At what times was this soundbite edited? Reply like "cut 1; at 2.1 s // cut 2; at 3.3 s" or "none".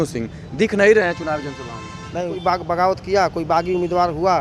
cut 1; at 2.4 s